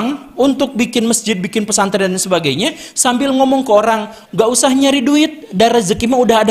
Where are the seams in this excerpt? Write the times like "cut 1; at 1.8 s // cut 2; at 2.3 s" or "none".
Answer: none